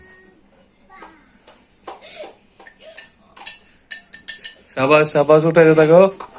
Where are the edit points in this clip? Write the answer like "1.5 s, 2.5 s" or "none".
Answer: none